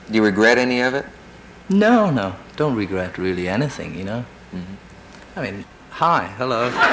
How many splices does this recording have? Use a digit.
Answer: 1